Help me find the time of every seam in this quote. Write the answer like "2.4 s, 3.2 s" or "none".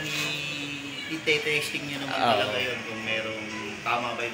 none